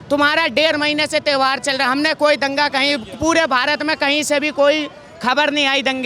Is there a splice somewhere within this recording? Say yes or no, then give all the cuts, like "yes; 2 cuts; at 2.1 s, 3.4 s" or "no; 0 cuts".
no; 0 cuts